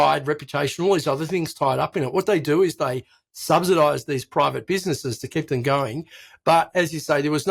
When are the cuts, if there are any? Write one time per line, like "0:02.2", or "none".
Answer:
none